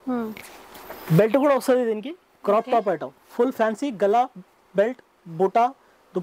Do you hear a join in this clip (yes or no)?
no